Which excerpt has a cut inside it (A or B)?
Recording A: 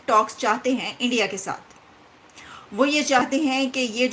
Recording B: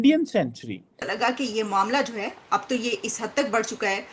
B